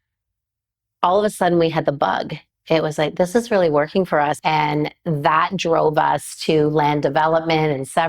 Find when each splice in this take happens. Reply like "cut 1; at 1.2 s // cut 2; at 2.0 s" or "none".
cut 1; at 4.4 s